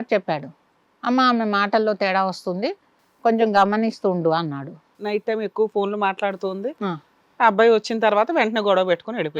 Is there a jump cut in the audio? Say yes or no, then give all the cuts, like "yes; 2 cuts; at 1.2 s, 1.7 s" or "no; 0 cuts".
yes; 1 cut; at 4.9 s